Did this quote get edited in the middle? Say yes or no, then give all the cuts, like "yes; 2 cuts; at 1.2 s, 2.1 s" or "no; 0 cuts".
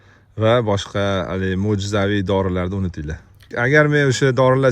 yes; 1 cut; at 3.5 s